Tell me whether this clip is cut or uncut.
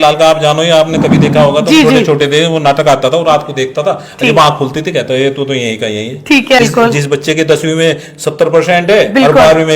cut